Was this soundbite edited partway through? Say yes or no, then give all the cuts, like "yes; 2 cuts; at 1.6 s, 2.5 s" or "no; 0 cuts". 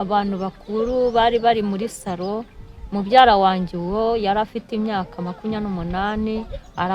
no; 0 cuts